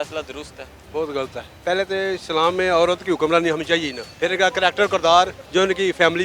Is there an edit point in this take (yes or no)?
yes